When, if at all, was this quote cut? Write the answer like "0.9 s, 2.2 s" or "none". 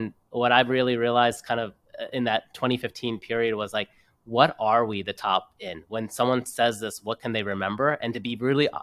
none